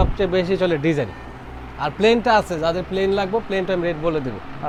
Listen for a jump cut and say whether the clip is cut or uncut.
uncut